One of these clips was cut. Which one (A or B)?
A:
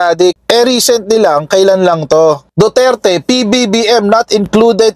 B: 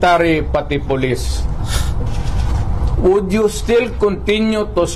A